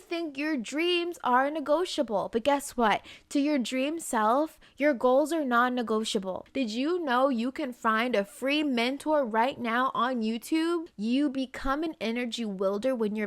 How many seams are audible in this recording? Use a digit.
2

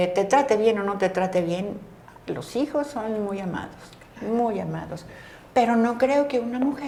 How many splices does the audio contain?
0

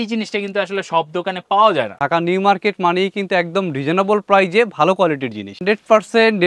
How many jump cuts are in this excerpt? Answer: 2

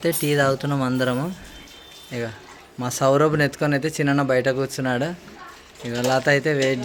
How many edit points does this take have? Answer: 0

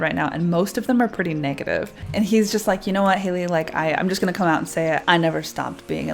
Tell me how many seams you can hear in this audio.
2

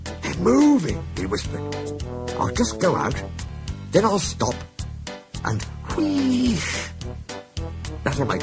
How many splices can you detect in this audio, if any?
1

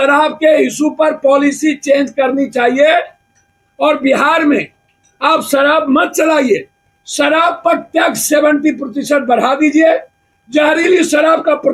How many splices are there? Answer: 0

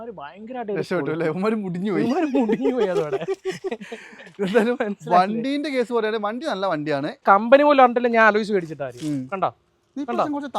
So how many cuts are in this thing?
1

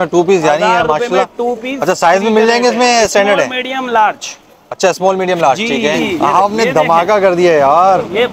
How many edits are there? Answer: 1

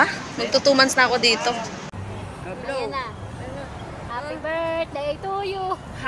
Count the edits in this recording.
1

